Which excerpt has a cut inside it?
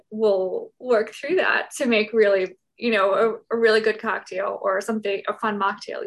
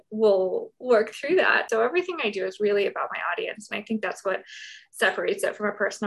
second; 1 cut; at 1.7 s

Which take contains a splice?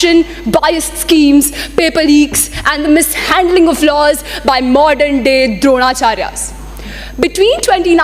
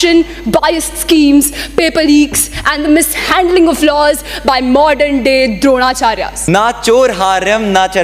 second; 1 cut; at 6.3 s

